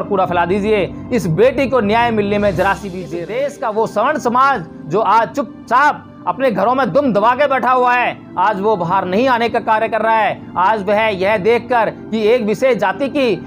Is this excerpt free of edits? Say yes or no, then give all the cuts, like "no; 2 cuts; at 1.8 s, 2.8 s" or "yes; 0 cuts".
no; 1 cut; at 3.0 s